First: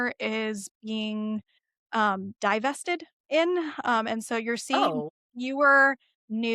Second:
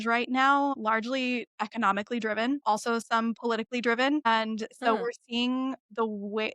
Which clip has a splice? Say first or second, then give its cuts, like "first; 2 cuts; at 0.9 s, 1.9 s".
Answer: second; 3 cuts; at 0.8 s, 2.6 s, 4.3 s